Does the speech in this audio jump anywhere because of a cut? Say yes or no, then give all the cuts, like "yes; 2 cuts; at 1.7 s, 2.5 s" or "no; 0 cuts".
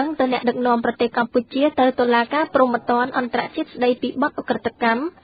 no; 0 cuts